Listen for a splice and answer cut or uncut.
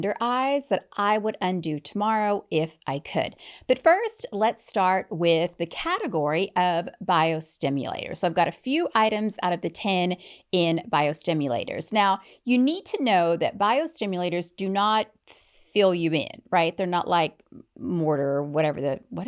uncut